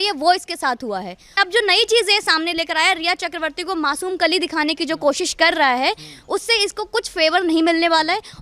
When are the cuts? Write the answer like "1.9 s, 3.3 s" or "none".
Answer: 1.4 s